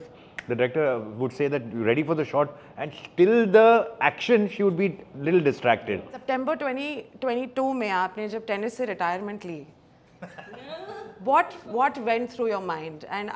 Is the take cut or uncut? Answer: cut